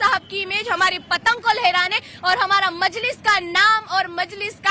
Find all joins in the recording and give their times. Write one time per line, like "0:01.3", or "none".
none